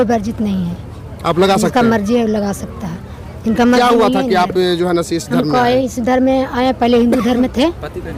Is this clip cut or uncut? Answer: uncut